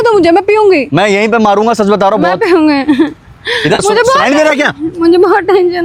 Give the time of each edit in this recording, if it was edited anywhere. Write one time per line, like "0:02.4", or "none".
none